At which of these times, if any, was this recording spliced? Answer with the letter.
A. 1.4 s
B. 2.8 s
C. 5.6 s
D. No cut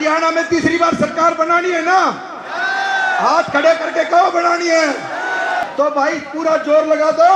C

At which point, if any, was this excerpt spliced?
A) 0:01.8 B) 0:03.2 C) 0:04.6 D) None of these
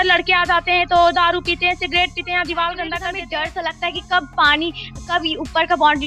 B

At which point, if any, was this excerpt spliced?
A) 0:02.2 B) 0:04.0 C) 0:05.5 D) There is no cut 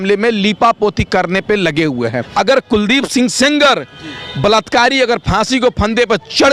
A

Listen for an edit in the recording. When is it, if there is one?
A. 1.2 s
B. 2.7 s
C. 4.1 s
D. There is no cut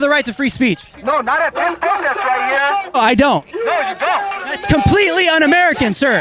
D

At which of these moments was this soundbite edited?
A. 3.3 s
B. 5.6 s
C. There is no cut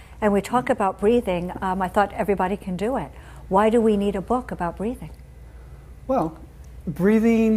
A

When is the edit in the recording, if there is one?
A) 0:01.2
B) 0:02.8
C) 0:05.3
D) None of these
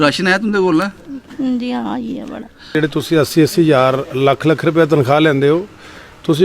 B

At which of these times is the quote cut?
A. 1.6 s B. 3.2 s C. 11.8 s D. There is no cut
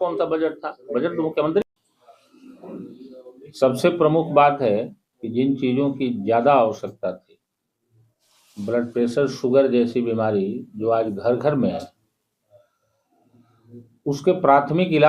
A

